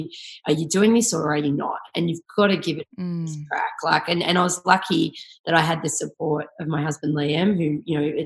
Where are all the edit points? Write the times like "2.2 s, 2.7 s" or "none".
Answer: none